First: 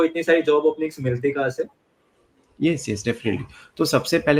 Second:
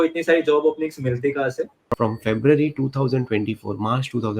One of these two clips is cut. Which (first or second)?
second